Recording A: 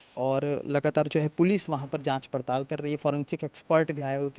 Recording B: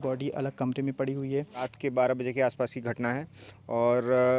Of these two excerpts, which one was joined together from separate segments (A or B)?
B